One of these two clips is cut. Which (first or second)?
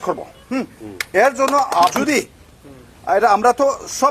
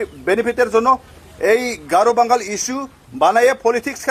first